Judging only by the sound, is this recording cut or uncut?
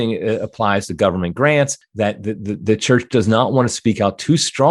cut